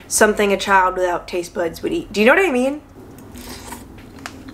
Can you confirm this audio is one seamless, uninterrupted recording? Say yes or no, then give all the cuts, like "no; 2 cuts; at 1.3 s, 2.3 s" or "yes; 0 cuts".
yes; 0 cuts